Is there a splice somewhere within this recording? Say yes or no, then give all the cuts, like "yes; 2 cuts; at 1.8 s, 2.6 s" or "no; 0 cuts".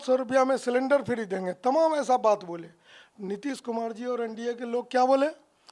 no; 0 cuts